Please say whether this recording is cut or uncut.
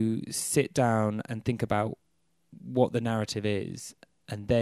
uncut